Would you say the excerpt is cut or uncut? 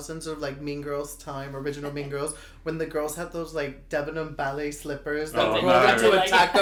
uncut